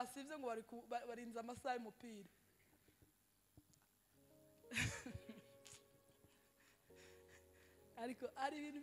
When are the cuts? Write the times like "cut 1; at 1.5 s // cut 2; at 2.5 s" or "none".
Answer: none